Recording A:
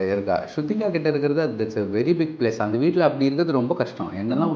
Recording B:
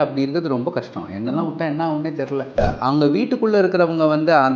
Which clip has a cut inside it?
B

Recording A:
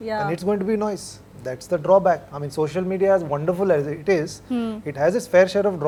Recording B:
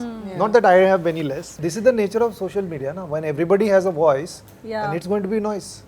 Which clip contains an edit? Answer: B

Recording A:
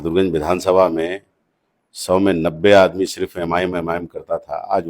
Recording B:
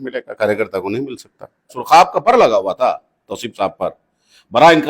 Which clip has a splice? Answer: B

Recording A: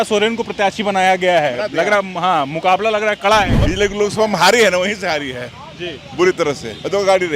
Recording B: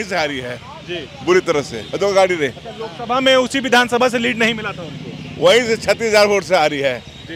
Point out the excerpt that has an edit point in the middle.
A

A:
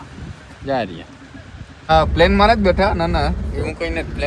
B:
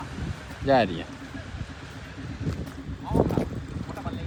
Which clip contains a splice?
A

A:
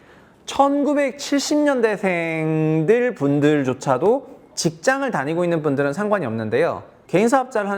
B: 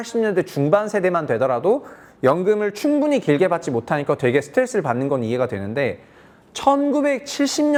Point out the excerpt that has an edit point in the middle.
A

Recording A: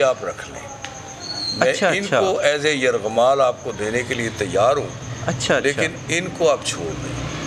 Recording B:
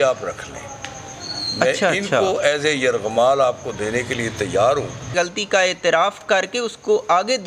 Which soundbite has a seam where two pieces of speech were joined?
B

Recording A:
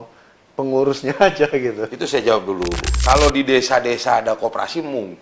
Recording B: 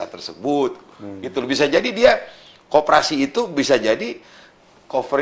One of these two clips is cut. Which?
A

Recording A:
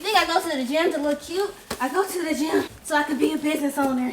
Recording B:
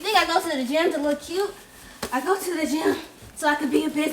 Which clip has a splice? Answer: A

